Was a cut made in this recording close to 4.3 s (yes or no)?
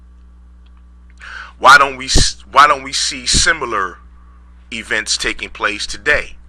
yes